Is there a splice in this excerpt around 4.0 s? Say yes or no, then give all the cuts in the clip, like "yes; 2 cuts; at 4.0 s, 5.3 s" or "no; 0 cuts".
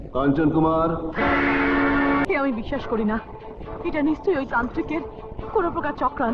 no; 1 cut; at 2.2 s